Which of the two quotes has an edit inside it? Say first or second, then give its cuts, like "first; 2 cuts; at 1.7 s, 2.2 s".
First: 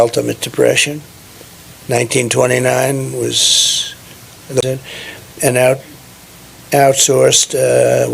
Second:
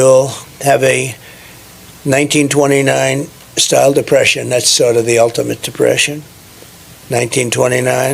first; 1 cut; at 4.6 s